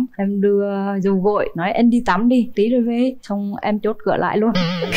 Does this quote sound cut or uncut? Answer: uncut